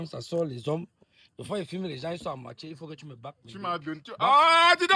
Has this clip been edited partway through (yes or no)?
no